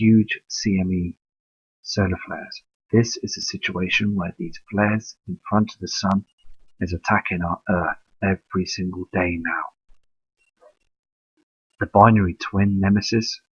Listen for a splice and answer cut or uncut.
cut